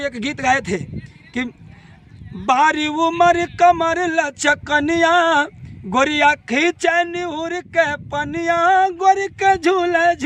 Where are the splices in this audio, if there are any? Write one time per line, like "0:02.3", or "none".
none